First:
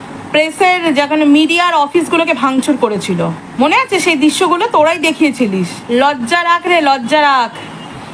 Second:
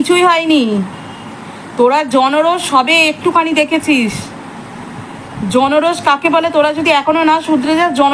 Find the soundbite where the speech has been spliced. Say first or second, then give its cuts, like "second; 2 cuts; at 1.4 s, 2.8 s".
first; 2 cuts; at 3.4 s, 5.8 s